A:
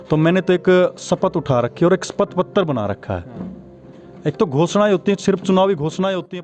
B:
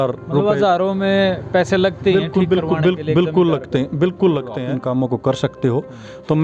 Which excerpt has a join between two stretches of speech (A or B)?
B